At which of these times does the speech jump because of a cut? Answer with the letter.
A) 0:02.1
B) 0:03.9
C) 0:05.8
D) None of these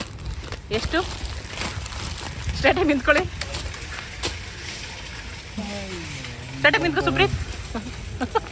D